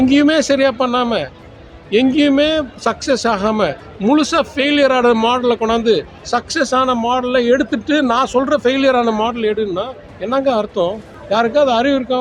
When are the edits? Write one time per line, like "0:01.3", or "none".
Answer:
0:11.1